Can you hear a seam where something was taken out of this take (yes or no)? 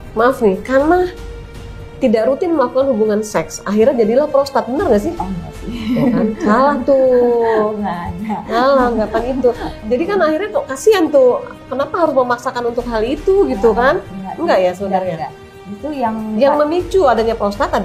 no